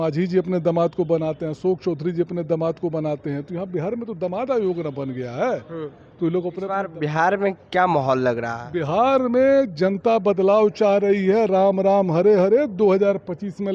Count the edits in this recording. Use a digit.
1